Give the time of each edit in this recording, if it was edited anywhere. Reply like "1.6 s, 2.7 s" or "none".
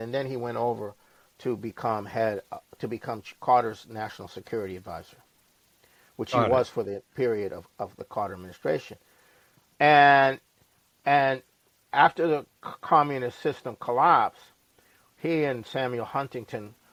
none